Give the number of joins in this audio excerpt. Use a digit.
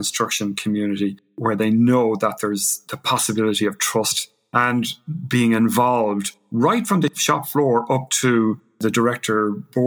2